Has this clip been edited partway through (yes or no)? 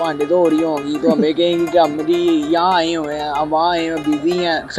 no